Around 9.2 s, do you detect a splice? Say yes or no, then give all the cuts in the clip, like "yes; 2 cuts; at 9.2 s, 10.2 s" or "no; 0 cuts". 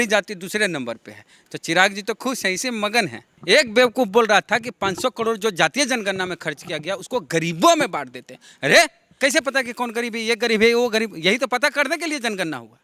yes; 2 cuts; at 3.3 s, 9.2 s